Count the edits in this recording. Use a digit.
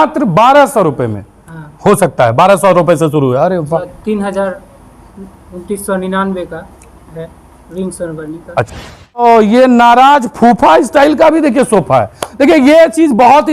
2